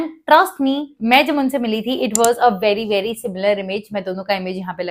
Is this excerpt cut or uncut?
uncut